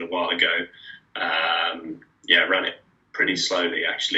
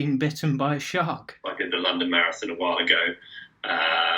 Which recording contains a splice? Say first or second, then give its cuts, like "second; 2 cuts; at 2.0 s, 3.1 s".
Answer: second; 1 cut; at 1.4 s